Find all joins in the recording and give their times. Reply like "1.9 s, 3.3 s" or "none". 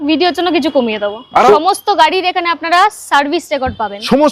1.5 s